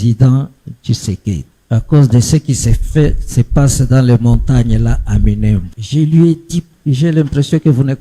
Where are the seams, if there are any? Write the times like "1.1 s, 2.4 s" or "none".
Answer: 1.5 s, 5.8 s, 6.7 s